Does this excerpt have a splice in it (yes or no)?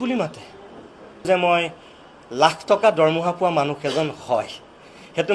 yes